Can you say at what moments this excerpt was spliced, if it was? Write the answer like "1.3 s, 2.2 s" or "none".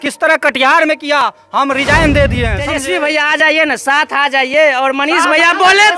2.6 s

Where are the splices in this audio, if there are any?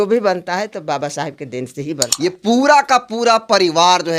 2.1 s

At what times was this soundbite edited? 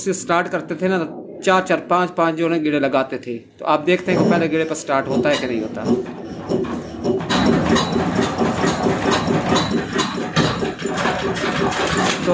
none

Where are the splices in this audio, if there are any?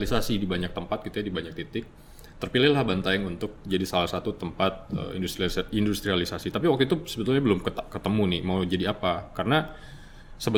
none

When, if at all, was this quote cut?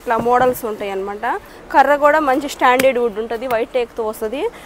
1.5 s

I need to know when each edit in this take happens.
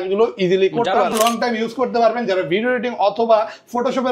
1.1 s

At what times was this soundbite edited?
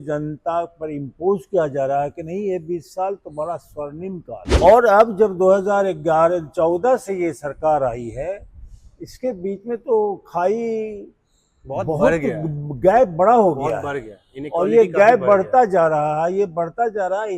4.4 s

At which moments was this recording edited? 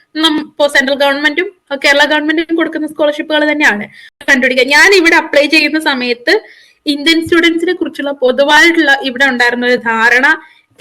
4.2 s

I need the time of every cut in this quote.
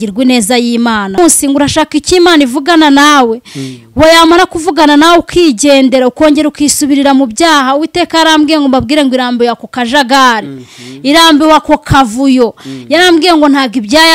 1.2 s

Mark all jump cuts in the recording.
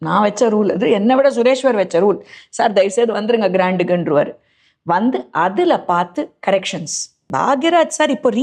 7.2 s

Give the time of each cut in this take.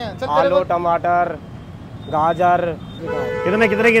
2.9 s

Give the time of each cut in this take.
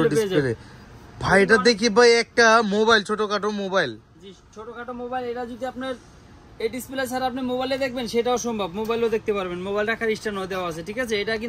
none

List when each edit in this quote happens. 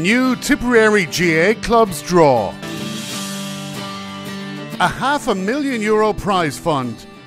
2.2 s

